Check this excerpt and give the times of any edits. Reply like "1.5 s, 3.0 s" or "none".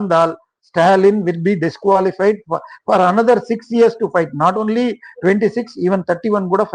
none

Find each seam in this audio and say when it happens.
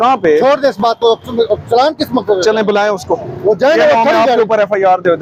none

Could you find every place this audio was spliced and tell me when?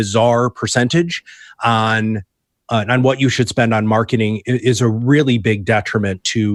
none

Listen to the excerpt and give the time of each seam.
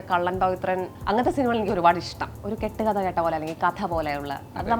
0.9 s, 2.2 s

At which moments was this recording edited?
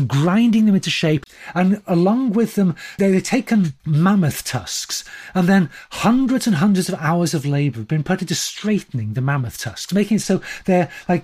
1.3 s, 3.0 s, 3.8 s

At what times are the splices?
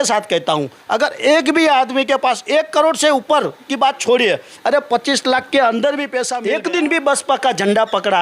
6.3 s

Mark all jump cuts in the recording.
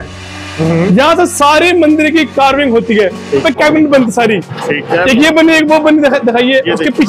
3.4 s

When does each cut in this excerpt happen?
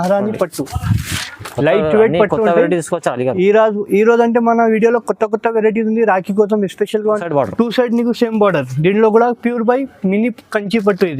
7.2 s

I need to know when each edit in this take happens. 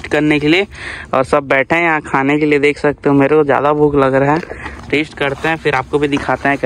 none

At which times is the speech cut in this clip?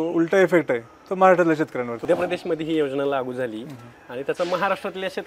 2.0 s

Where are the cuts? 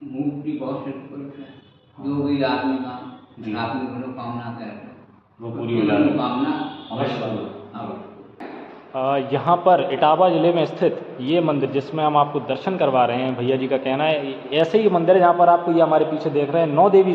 8.4 s

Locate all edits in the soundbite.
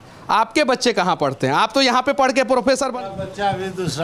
2.9 s

